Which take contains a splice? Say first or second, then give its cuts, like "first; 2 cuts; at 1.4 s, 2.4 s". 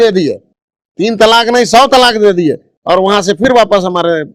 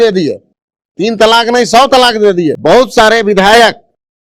second; 1 cut; at 2.6 s